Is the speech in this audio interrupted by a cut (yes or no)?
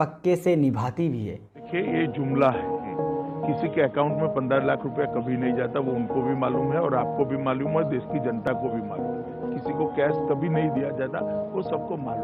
yes